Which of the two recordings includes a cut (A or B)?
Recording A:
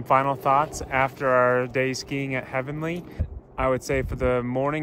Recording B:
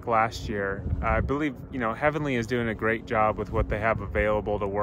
A